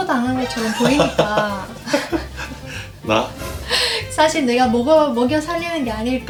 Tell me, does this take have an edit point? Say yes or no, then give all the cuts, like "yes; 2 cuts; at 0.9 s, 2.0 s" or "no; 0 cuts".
no; 0 cuts